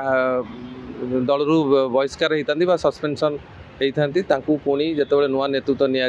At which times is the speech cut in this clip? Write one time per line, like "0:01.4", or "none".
none